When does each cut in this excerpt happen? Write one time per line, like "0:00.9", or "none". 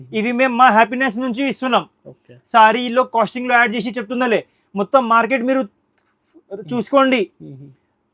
none